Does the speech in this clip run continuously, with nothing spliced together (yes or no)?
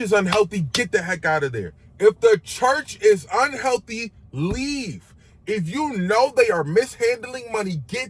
yes